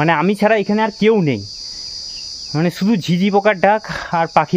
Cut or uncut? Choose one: uncut